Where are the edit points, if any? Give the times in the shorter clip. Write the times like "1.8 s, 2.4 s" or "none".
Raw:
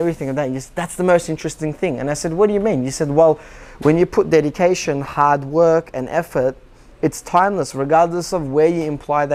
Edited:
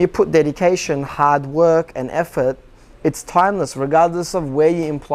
none